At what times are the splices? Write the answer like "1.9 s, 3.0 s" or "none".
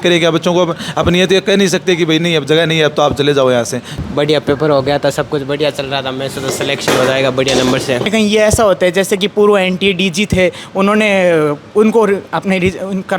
3.9 s, 8.1 s